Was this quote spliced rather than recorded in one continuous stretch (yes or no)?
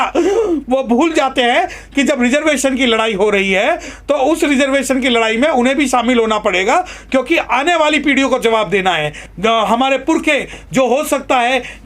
yes